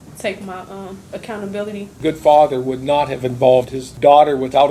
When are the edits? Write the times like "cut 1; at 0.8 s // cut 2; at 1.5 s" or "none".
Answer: cut 1; at 1.0 s // cut 2; at 1.9 s // cut 3; at 3.8 s